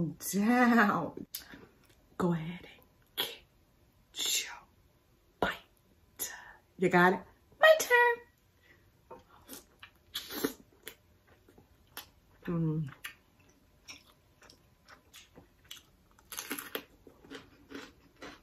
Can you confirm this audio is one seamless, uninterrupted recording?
no; 2 cuts; at 1.2 s, 15.2 s

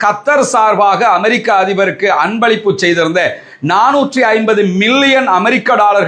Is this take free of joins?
yes; 0 cuts

